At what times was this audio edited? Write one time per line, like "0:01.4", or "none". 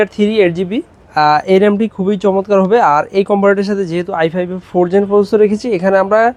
none